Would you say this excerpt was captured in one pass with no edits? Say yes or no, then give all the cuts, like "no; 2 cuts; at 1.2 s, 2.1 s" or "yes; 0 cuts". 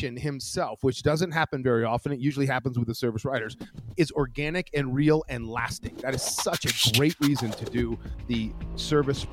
no; 1 cut; at 8.1 s